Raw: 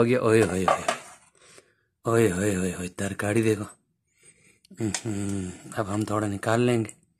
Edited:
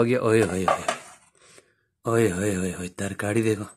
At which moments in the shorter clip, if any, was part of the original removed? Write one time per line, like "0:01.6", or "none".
none